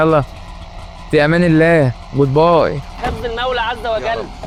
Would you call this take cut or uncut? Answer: uncut